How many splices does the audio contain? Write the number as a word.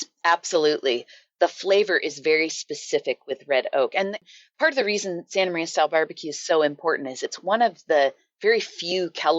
one